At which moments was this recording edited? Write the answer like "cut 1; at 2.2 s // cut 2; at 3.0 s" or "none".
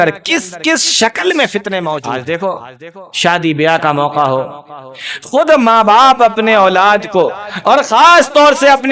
cut 1; at 2.0 s